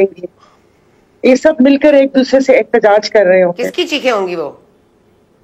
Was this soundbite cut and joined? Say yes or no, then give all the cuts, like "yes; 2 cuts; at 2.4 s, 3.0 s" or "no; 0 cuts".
no; 0 cuts